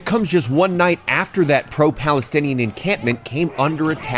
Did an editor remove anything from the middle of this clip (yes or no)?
no